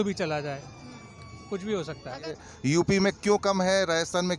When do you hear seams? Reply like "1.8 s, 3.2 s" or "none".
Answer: 2.4 s